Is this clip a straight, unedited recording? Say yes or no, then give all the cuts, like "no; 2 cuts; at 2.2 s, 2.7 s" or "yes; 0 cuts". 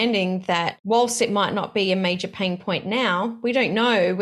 yes; 0 cuts